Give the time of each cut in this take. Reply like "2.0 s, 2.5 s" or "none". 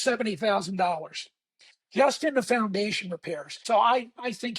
3.6 s